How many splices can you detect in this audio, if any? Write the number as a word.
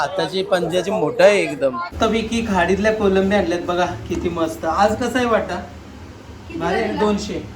one